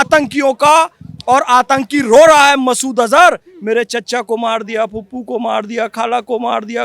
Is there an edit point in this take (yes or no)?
no